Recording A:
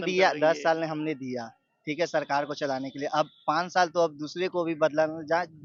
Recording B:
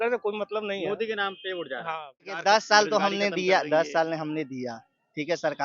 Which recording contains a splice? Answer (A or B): B